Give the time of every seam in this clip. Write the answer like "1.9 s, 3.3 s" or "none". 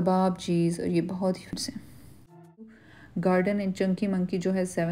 2.8 s